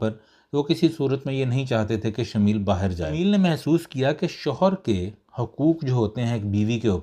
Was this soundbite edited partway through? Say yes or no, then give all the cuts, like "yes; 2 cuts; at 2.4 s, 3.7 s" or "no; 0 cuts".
yes; 1 cut; at 3.1 s